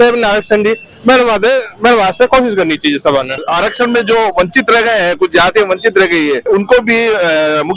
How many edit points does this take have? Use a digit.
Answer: 2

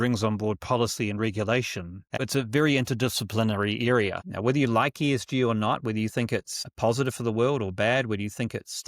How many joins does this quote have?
3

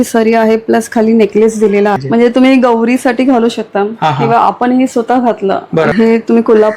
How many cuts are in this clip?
2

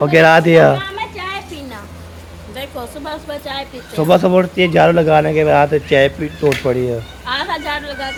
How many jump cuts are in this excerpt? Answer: 0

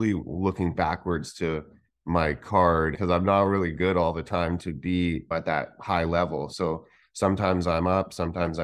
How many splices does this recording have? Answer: 1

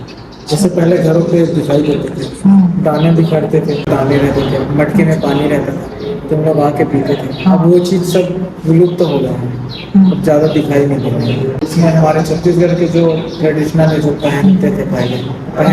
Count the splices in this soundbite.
0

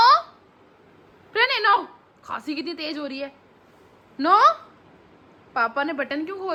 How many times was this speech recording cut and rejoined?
0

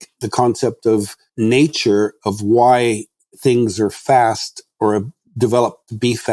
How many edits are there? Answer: 1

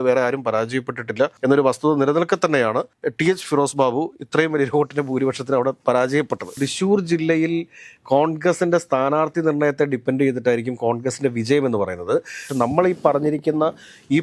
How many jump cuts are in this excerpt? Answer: 2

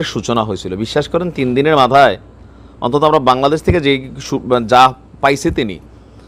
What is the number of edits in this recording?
0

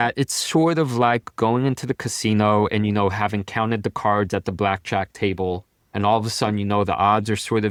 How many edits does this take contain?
0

